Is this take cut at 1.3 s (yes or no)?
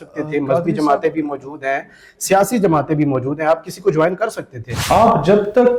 no